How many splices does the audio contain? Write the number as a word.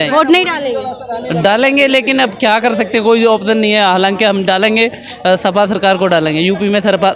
zero